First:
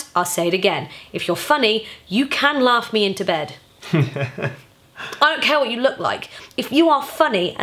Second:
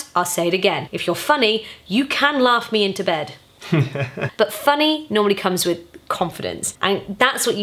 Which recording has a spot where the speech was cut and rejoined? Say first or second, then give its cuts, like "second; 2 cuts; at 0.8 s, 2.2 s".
second; 3 cuts; at 0.9 s, 4.2 s, 6.7 s